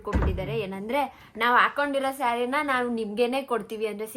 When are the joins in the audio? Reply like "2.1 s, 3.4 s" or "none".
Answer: none